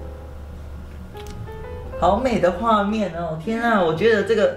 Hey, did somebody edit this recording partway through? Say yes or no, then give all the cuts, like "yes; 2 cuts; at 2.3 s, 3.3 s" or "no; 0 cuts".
no; 0 cuts